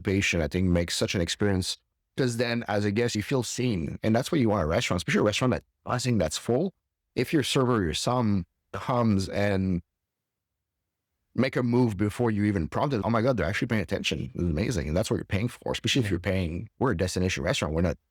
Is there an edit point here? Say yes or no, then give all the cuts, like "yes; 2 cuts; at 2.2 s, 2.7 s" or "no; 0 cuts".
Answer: yes; 2 cuts; at 3.1 s, 16.6 s